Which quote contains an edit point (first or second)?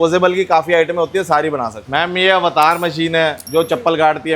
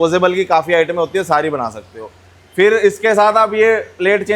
first